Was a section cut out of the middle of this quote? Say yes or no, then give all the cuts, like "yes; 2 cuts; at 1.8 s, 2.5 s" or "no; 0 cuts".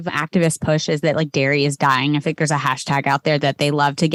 no; 0 cuts